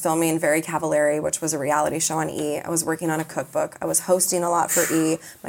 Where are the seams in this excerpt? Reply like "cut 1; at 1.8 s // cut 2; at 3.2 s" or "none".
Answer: none